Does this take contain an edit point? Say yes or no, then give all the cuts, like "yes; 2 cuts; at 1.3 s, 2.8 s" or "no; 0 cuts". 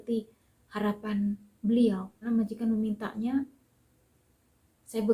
yes; 1 cut; at 2.2 s